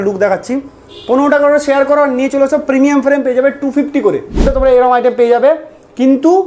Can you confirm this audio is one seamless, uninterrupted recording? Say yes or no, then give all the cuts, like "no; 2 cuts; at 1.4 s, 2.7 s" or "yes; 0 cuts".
no; 1 cut; at 4.5 s